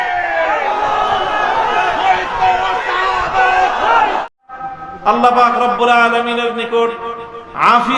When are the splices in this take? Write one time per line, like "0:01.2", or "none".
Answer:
0:04.2